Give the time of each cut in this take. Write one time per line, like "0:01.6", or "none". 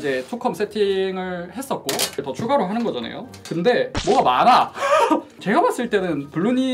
0:02.2
0:03.9
0:05.3